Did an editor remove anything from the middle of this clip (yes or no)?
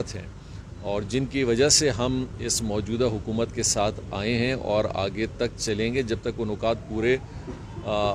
no